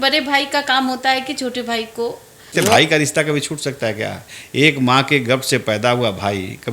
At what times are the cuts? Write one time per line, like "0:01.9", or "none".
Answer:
0:02.5